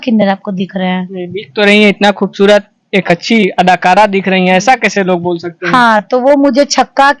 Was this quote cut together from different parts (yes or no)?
no